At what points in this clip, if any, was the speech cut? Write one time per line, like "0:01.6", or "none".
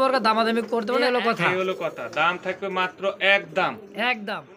0:00.9